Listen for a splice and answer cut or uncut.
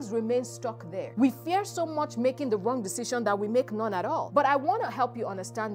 cut